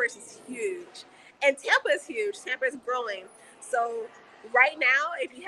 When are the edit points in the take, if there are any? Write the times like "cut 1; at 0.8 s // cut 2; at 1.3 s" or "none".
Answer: none